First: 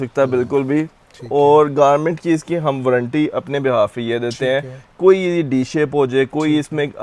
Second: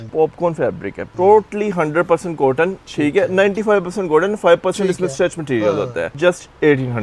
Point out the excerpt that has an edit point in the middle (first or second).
second